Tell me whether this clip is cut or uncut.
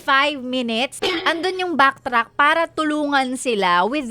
cut